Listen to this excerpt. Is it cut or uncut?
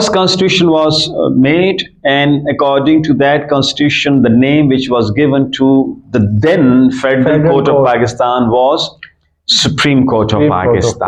uncut